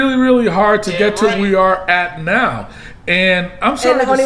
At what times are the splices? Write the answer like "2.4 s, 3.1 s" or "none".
none